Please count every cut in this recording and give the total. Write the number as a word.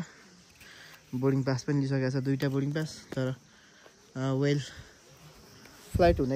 zero